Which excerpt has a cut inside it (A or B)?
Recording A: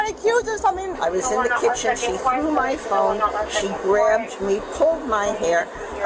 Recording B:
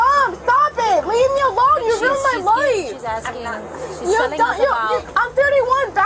A